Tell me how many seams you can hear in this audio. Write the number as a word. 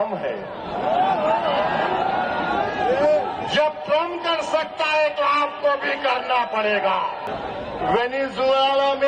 one